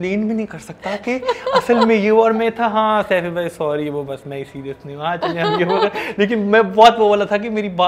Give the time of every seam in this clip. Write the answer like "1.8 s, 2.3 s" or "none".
none